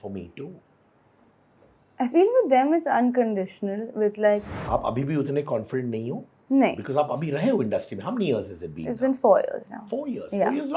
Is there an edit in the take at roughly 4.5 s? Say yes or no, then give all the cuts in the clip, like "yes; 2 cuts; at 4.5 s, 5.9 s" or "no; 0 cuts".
yes; 1 cut; at 4.5 s